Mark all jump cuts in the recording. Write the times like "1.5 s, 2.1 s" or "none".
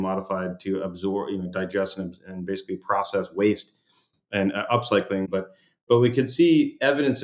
5.3 s